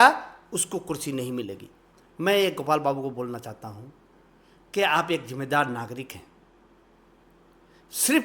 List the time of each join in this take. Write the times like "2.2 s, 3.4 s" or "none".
2.1 s